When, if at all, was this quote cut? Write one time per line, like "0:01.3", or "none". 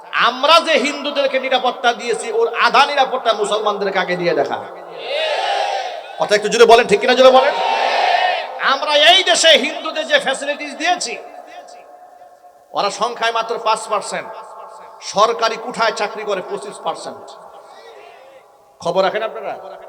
none